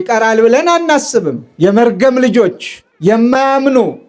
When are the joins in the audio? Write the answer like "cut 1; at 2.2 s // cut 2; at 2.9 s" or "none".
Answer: cut 1; at 1.4 s